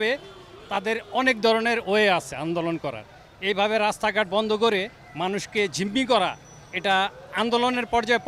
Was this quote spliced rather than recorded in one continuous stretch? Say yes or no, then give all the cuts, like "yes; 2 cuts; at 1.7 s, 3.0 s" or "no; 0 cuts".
no; 0 cuts